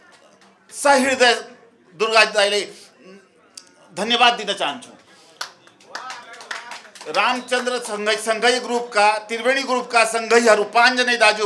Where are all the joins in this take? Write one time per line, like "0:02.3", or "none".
none